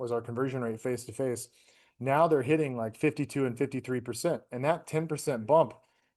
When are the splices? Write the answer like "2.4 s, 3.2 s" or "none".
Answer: none